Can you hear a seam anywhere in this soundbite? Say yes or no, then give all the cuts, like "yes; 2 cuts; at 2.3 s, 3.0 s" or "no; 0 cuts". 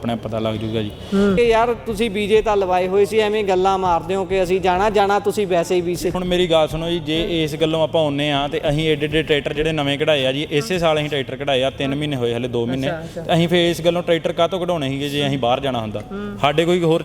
yes; 2 cuts; at 1.4 s, 6.2 s